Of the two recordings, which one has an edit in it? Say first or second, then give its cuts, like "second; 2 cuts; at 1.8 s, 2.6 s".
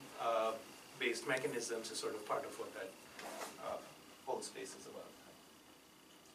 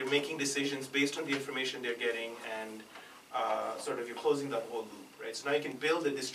second; 1 cut; at 2.9 s